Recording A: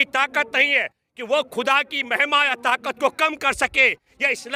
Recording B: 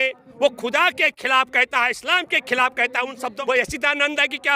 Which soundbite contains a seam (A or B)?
B